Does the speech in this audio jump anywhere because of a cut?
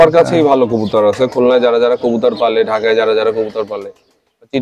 no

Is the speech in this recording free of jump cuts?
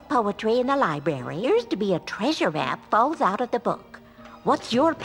no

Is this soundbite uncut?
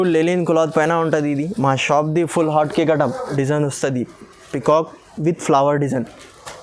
no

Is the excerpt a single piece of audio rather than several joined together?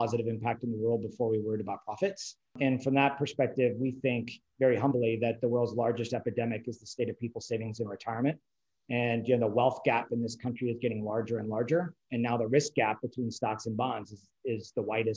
no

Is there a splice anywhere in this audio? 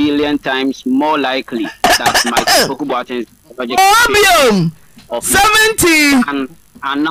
no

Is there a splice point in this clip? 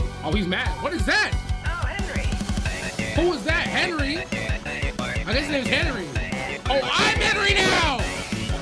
no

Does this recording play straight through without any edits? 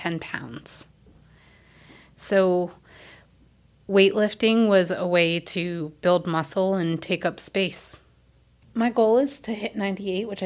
no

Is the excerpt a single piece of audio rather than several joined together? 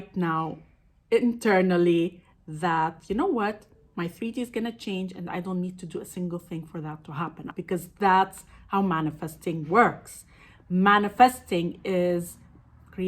no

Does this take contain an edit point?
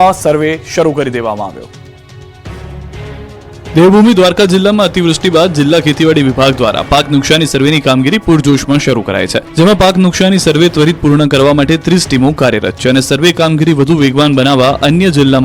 yes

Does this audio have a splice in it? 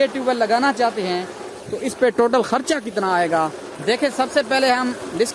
no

